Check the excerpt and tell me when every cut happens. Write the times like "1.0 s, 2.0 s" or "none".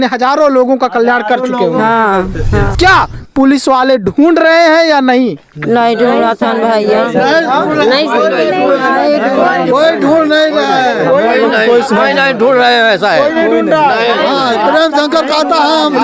2.7 s